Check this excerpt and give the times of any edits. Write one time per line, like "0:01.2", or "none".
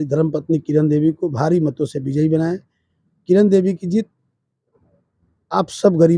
none